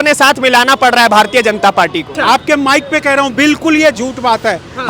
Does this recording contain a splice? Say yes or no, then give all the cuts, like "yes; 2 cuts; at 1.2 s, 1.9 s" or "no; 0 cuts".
yes; 1 cut; at 2.1 s